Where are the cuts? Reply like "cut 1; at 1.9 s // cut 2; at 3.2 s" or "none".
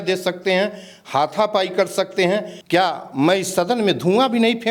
cut 1; at 2.5 s